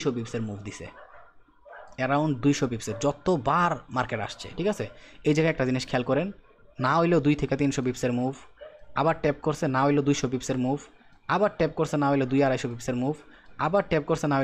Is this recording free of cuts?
yes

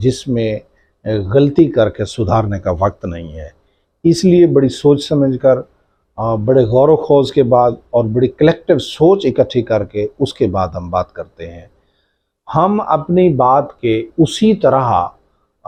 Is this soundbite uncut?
yes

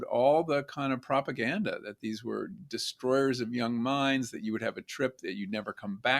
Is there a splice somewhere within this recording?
no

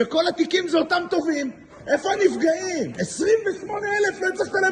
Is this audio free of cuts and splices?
no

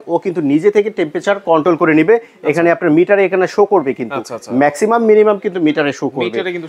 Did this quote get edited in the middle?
no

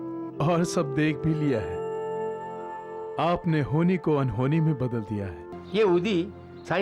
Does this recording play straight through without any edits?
no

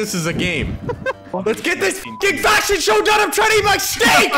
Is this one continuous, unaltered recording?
no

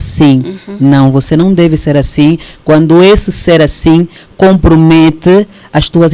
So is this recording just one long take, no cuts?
yes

